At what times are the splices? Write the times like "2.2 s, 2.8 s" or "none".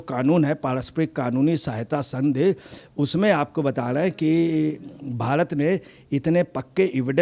none